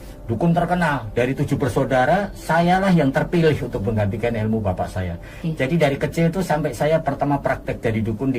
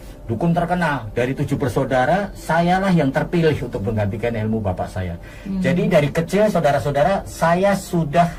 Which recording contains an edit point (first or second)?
first